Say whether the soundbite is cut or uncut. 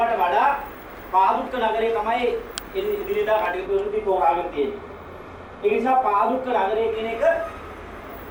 uncut